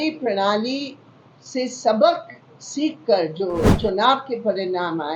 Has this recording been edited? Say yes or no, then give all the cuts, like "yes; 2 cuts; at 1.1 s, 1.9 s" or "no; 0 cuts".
yes; 1 cut; at 3.7 s